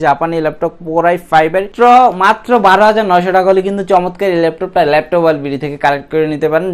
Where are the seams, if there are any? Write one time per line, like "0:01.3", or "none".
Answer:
0:01.7